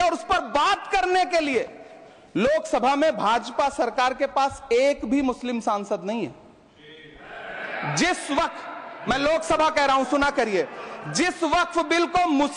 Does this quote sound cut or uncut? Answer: uncut